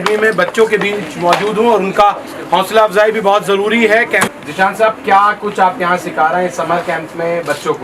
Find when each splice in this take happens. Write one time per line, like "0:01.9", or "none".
0:04.3